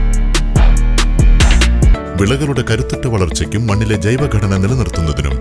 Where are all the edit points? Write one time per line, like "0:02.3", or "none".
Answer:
0:02.0